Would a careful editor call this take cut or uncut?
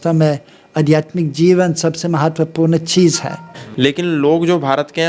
cut